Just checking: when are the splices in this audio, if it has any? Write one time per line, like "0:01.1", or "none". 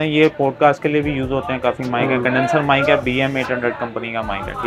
none